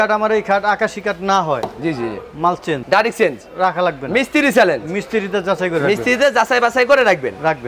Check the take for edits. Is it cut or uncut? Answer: uncut